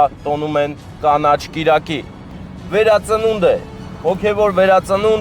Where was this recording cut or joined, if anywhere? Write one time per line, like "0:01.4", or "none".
0:02.4